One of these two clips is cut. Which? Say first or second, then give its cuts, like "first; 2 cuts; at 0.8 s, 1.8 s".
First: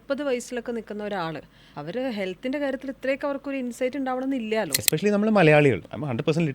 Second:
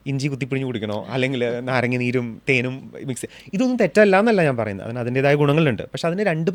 first; 1 cut; at 4.8 s